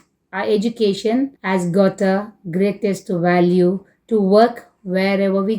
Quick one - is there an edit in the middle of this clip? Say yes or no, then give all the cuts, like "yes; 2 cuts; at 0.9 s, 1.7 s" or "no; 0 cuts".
yes; 1 cut; at 1.4 s